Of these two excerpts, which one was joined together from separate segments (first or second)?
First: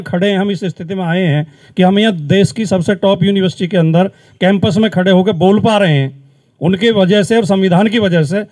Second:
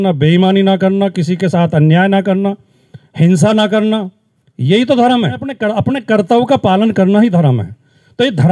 second